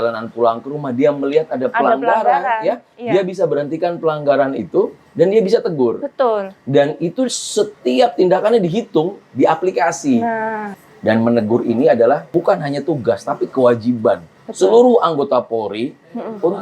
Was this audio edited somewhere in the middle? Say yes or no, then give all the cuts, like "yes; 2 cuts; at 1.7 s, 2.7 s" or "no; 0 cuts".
yes; 2 cuts; at 10.7 s, 12.3 s